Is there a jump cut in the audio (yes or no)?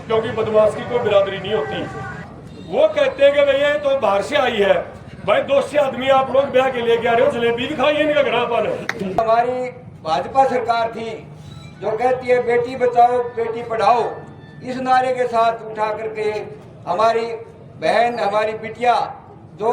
yes